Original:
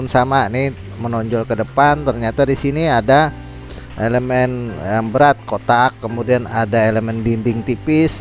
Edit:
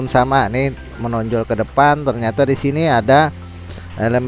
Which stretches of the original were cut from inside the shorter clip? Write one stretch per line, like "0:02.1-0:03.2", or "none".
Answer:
none